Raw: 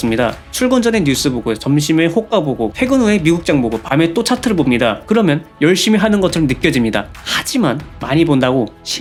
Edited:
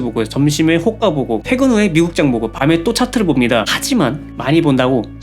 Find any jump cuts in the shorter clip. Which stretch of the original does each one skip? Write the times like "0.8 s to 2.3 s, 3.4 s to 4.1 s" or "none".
5.0 s to 7.3 s

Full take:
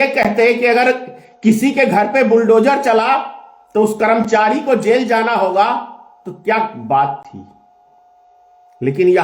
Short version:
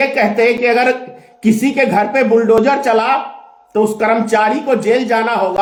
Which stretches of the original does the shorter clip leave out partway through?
none

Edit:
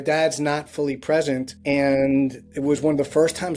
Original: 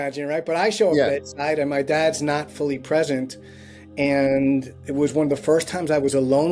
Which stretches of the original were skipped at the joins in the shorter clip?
3.3 s to 3.8 s

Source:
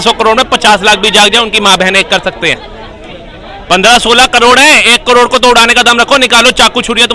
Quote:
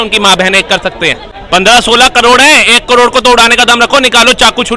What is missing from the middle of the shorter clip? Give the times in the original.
2.7 s to 3.5 s

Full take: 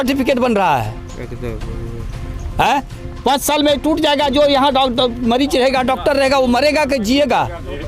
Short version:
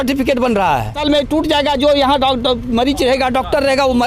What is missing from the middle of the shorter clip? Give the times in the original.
0.9 s to 3.5 s

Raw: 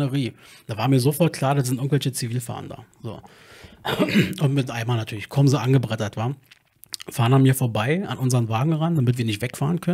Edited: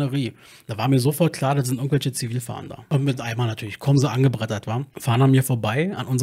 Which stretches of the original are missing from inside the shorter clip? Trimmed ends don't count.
2.9 s to 4.4 s, 6.4 s to 7.0 s

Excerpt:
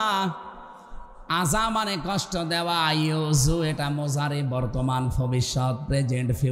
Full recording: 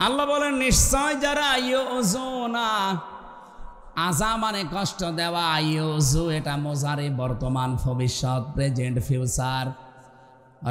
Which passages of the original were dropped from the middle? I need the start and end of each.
none

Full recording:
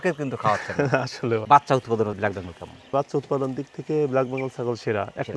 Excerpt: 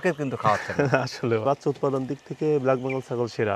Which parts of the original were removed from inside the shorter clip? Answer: 1.4 s to 2.9 s

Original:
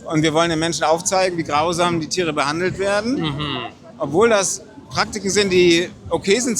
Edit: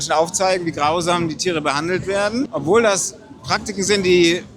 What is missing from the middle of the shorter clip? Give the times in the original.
3.2 s to 3.9 s

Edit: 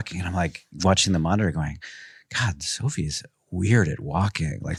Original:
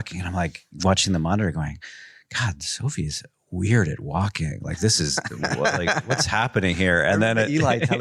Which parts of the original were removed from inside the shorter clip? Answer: none

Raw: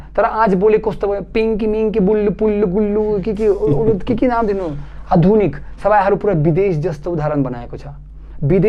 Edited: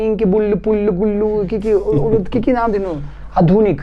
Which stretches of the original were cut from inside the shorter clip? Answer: none

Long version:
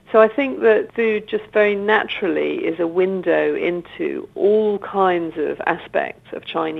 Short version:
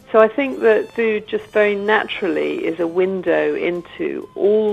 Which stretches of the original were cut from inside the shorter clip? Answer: none

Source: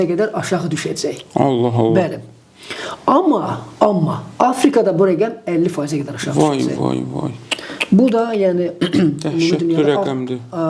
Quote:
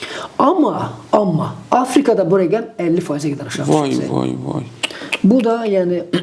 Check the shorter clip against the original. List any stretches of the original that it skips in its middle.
none

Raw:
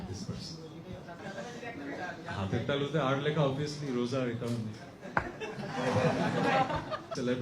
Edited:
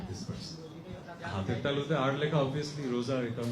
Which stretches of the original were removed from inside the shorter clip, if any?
1.2 s to 2.2 s

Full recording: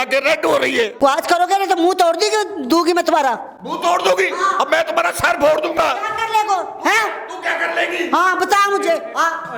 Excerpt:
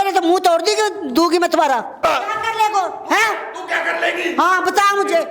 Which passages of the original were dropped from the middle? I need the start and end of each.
3.5 s to 5.7 s

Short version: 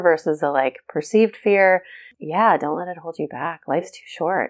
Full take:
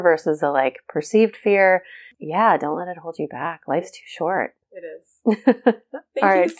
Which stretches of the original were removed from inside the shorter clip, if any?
none

